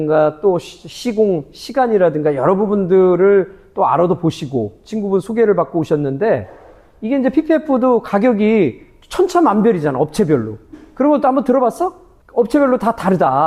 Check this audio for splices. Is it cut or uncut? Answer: uncut